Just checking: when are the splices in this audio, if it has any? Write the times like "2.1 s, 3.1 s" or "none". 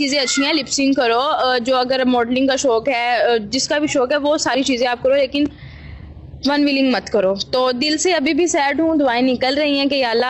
none